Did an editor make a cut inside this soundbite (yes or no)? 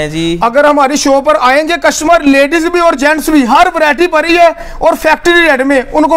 no